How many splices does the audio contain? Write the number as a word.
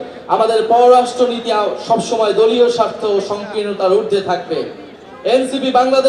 zero